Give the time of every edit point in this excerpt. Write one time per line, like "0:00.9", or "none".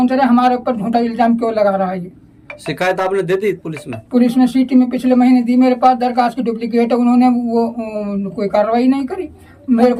none

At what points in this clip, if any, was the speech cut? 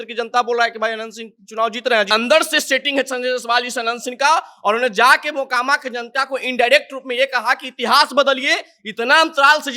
0:02.1

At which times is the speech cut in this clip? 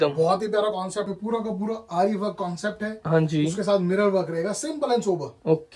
0:01.1

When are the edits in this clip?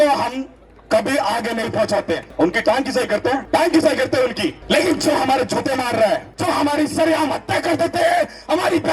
0:02.3
0:03.4
0:04.6
0:06.3

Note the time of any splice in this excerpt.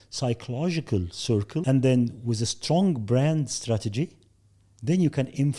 0:01.6

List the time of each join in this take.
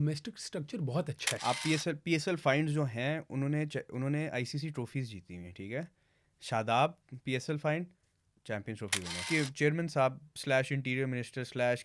0:01.4
0:09.2

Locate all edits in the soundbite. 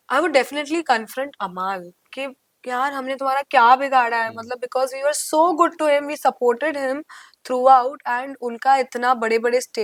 none

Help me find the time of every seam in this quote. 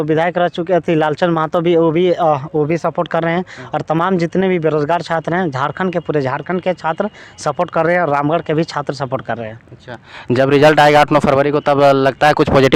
none

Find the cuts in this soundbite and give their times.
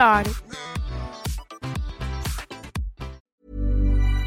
0:03.3

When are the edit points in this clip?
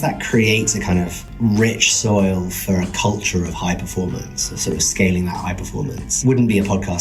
0:01.2
0:06.0

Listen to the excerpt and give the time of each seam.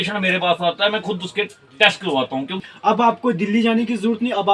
0:02.7

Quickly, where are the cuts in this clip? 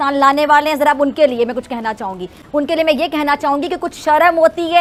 none

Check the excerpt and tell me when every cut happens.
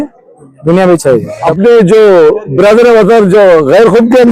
0:01.5

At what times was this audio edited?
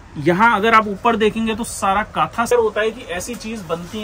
0:02.5

